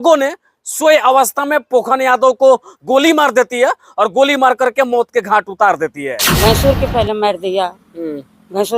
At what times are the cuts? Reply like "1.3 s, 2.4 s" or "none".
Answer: 6.2 s